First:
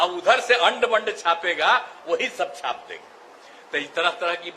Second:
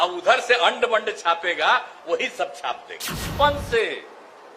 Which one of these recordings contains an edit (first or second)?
second